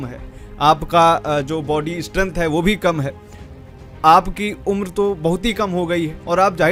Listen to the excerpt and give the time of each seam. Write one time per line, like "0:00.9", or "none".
none